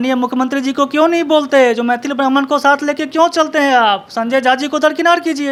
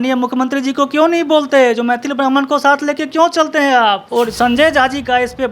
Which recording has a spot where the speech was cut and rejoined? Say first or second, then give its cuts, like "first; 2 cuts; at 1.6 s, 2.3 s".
second; 1 cut; at 4.0 s